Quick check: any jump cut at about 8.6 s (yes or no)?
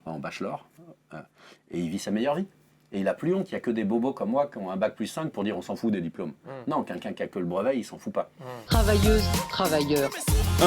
yes